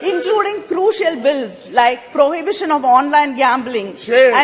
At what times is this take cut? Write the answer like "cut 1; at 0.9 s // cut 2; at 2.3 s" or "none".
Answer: none